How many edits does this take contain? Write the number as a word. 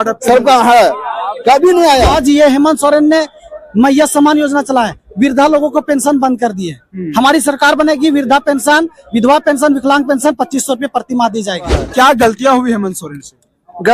two